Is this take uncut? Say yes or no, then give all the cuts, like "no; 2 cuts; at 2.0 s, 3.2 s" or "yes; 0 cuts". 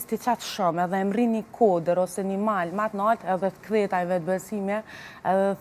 yes; 0 cuts